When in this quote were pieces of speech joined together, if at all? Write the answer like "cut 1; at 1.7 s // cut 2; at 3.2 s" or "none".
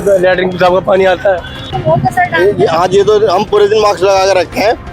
cut 1; at 1.7 s

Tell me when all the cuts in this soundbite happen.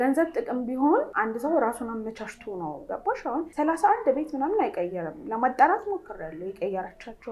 cut 1; at 1.1 s // cut 2; at 3.2 s

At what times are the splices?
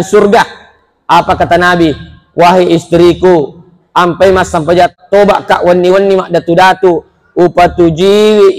cut 1; at 4.9 s

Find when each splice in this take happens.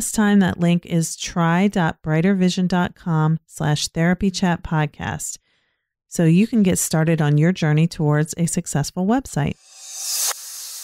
cut 1; at 9.8 s

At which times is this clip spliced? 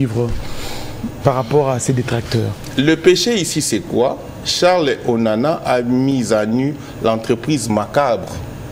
none

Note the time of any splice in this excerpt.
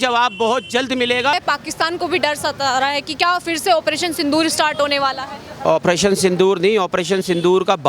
cut 1; at 1.3 s

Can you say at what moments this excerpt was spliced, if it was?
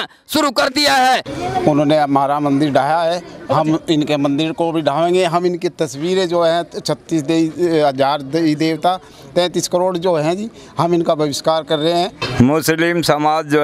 cut 1; at 1.3 s // cut 2; at 12.2 s

